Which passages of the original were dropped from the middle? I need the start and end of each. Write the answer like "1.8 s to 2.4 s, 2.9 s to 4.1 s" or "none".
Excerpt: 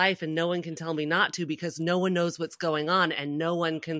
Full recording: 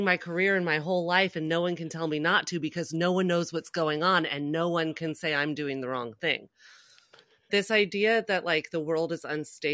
none